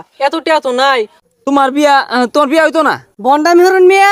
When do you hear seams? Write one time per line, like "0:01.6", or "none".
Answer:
0:01.2
0:03.1